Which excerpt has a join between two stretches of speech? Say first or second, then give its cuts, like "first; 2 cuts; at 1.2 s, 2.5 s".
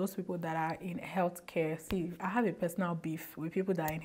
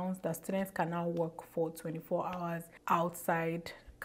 second; 1 cut; at 2.7 s